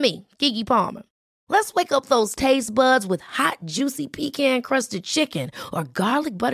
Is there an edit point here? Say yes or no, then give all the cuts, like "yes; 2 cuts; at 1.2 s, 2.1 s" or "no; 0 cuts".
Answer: no; 0 cuts